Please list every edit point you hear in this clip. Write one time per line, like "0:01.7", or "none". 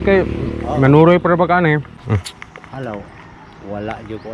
0:01.9